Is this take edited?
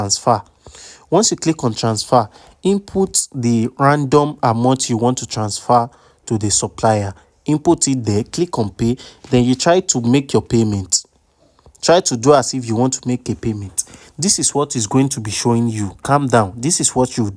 no; 0 cuts

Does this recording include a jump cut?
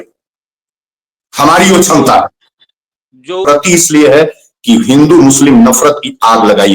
yes; 1 cut; at 3.5 s

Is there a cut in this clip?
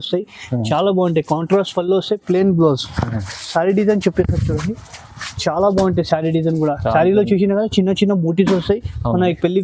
no; 0 cuts

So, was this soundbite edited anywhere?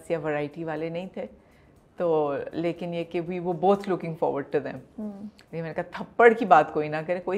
no; 0 cuts

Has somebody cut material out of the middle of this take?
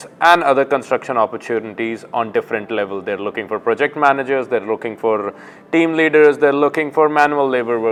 no; 0 cuts

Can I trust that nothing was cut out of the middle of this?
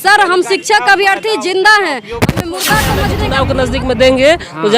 no; 1 cut; at 3.1 s

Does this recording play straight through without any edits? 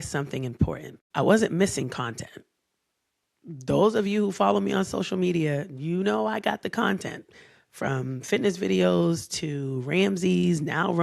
no; 1 cut; at 0.9 s

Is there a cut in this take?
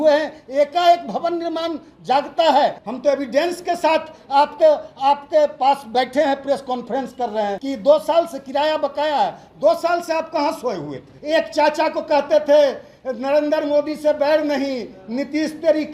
yes; 3 cuts; at 2.8 s, 7.6 s, 11.1 s

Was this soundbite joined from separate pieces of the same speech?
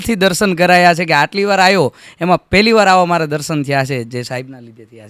no; 0 cuts

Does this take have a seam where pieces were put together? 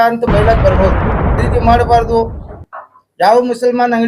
yes; 1 cut; at 1.4 s

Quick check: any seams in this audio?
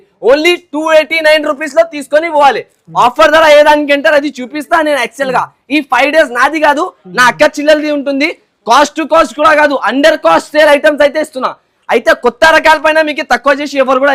no; 0 cuts

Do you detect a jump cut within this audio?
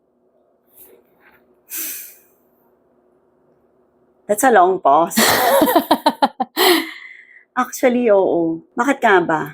yes; 1 cut; at 8.6 s

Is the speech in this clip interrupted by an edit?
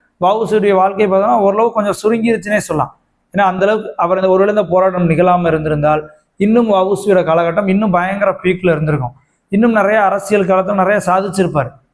no; 0 cuts

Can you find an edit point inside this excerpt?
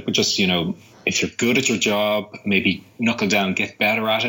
no; 0 cuts

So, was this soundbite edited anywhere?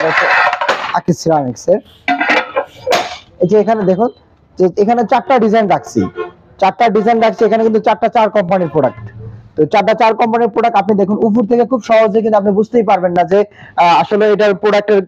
no; 0 cuts

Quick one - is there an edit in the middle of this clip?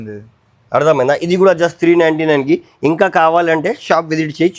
no; 0 cuts

